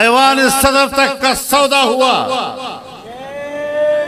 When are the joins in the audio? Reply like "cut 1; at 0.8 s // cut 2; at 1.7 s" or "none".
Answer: none